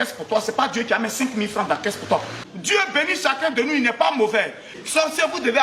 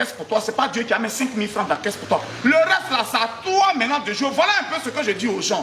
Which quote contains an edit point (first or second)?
first